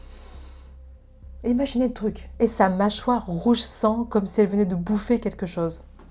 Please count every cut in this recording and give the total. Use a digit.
1